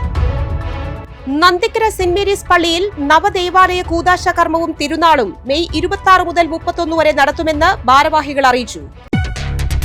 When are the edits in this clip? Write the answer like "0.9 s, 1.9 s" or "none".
1.1 s